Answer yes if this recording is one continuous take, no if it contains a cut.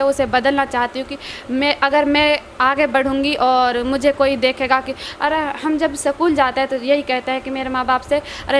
yes